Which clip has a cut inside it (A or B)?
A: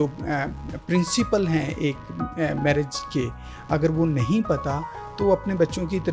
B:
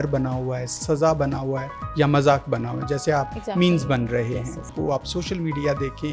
B